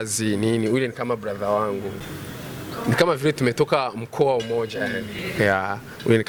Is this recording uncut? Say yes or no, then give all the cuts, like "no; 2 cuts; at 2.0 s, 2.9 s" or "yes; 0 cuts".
yes; 0 cuts